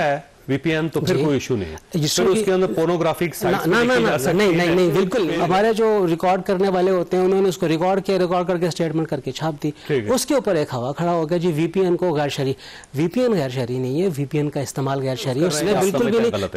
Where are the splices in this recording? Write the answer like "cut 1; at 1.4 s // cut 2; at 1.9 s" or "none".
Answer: cut 1; at 5.2 s // cut 2; at 15.6 s